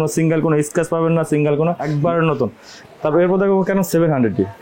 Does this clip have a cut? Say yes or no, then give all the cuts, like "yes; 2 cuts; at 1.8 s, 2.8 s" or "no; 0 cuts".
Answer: yes; 2 cuts; at 1.8 s, 2.7 s